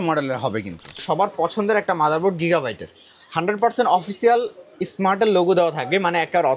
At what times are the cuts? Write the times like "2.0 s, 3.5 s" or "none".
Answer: 1.0 s